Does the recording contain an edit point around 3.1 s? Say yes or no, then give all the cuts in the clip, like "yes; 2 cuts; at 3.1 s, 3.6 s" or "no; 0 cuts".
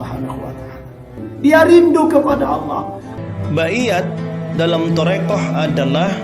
yes; 2 cuts; at 1.2 s, 3.1 s